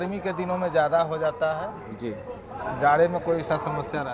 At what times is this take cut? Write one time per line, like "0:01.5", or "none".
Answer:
none